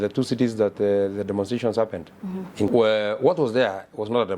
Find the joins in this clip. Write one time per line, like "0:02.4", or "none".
0:02.7